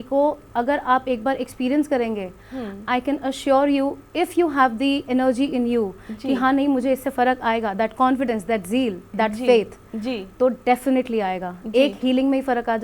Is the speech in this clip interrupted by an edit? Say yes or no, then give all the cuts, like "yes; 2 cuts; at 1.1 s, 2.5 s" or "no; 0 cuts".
no; 0 cuts